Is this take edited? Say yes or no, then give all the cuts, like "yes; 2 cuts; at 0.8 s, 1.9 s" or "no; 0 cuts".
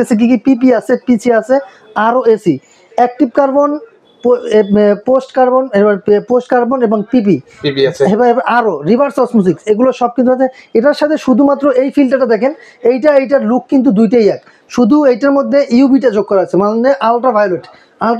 no; 0 cuts